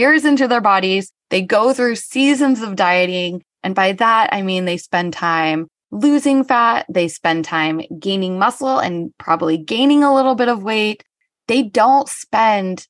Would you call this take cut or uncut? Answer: uncut